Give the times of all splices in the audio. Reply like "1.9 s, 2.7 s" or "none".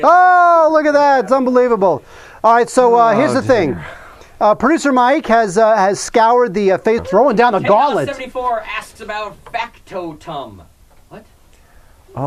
none